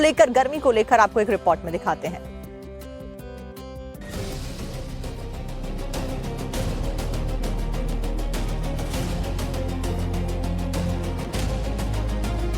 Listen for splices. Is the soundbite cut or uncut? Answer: uncut